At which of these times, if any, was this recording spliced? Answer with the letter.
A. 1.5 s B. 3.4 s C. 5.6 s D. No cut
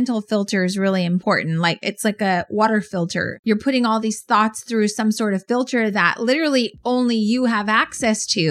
B